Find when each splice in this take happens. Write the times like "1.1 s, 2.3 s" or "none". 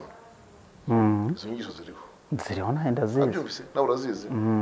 none